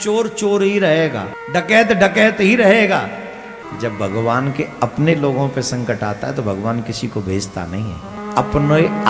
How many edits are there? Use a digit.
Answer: 3